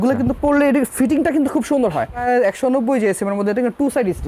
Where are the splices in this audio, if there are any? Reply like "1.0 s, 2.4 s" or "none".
2.2 s